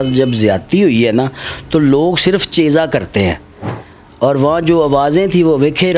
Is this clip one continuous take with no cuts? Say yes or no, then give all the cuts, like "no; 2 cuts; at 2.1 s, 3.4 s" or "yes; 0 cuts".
yes; 0 cuts